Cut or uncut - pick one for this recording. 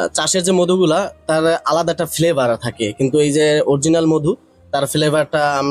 uncut